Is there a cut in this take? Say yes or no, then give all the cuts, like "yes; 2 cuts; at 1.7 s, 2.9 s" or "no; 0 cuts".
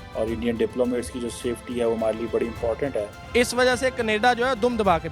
yes; 1 cut; at 3.2 s